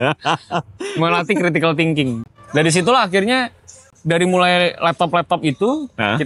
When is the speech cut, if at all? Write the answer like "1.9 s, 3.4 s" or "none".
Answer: 2.2 s

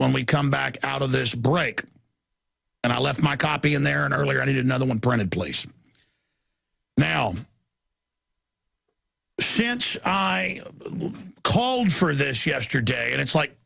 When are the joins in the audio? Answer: 10.1 s

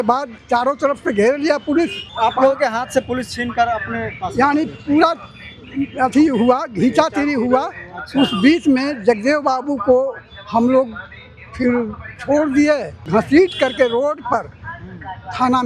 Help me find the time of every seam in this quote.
2.0 s, 12.9 s

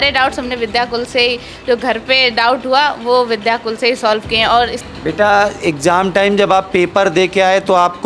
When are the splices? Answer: 4.8 s

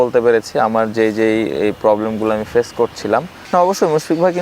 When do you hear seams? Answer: 3.4 s

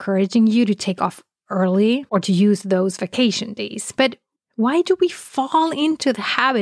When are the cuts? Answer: 2.1 s

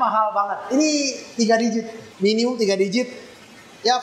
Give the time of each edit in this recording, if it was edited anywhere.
2.0 s

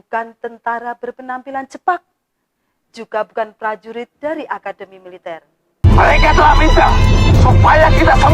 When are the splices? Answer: 5.9 s

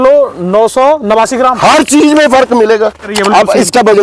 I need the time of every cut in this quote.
3.1 s

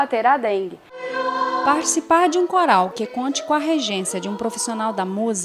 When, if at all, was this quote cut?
1.1 s

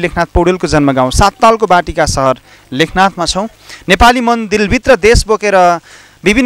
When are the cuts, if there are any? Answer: 3.6 s

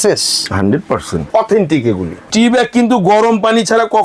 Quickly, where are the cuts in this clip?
1.3 s, 2.2 s

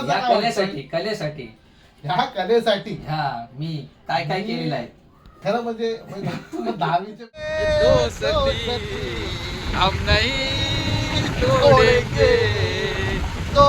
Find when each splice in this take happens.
7.6 s

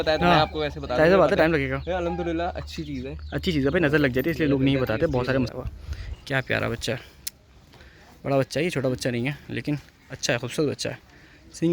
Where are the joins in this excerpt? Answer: 5.5 s

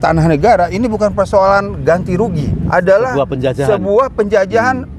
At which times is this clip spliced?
2.5 s

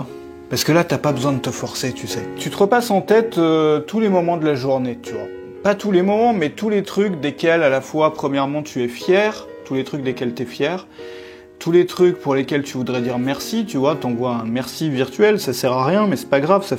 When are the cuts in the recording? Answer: 2.4 s

